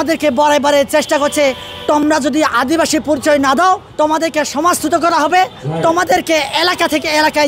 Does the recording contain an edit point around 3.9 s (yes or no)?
yes